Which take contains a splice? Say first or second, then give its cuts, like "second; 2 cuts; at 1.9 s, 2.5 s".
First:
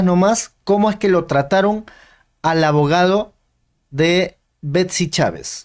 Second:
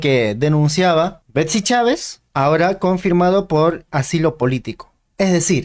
second; 2 cuts; at 1.2 s, 2.2 s